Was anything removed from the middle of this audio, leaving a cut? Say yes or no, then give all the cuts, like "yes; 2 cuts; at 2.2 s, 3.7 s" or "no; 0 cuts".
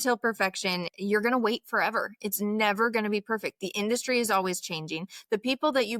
yes; 1 cut; at 0.9 s